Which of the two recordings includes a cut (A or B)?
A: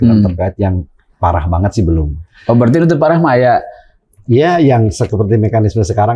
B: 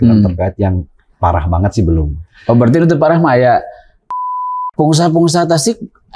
B